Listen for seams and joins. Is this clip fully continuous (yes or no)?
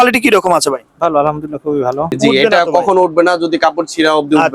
no